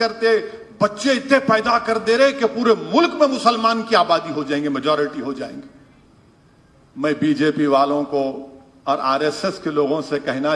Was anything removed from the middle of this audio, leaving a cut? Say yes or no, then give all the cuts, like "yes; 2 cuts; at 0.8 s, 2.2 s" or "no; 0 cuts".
no; 0 cuts